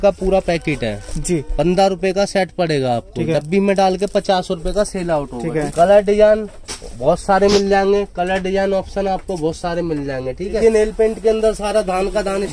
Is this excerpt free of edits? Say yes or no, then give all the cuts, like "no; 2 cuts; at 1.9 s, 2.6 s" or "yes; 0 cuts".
no; 2 cuts; at 5.7 s, 10.6 s